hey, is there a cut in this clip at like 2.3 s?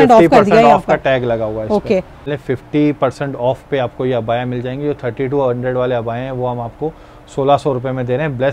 yes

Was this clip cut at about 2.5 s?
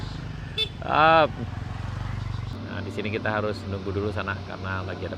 yes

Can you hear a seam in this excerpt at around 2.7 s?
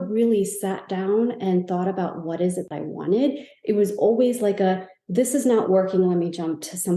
yes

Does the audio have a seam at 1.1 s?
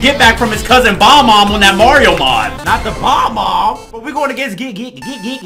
no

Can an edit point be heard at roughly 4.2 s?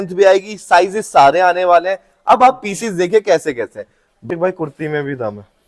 yes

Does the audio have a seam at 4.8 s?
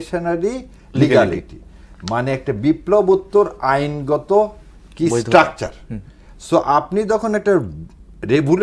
no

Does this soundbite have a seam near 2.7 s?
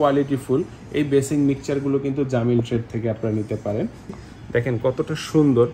no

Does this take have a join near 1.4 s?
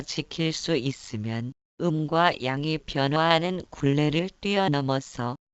no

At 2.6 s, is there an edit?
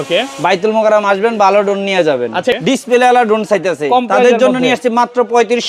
yes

